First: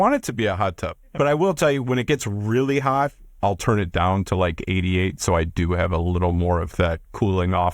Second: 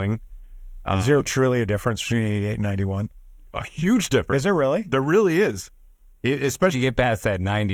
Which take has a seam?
first; 2 cuts; at 1.0 s, 3.3 s

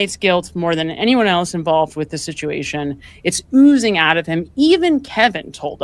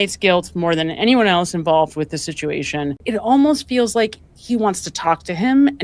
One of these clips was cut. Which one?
second; 1 cut; at 3.0 s

